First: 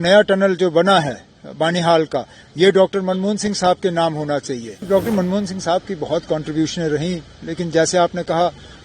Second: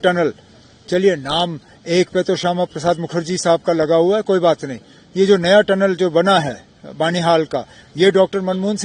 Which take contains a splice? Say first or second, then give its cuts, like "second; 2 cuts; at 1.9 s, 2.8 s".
first; 1 cut; at 4.8 s